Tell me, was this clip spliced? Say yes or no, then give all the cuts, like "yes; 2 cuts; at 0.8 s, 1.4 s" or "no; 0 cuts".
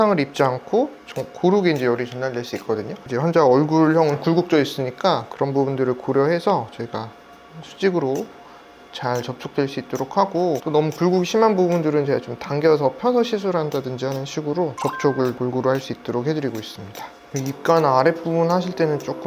no; 0 cuts